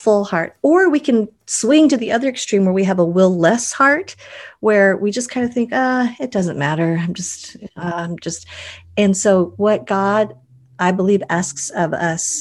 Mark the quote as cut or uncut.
uncut